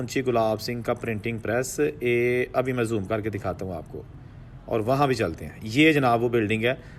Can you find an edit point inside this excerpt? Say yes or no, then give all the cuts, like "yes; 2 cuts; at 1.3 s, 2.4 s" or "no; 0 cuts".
no; 0 cuts